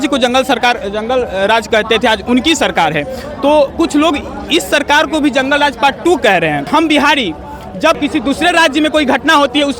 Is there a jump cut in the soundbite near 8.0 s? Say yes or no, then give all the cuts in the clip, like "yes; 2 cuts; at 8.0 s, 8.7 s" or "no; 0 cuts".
yes; 2 cuts; at 6.7 s, 8.0 s